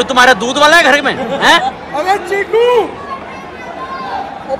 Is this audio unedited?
yes; 0 cuts

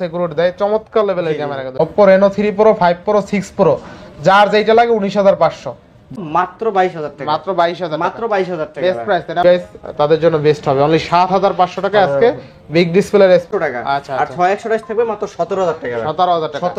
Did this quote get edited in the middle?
yes; 4 cuts; at 1.8 s, 6.2 s, 9.4 s, 13.5 s

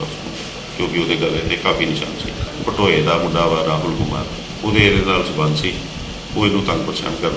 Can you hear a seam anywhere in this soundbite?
yes; 2 cuts; at 2.4 s, 4.4 s

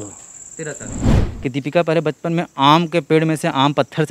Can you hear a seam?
yes; 1 cut; at 1.2 s

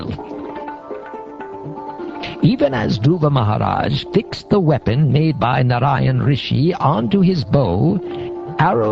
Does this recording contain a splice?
yes; 1 cut; at 4.7 s

